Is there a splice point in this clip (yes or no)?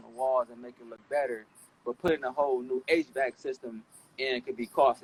no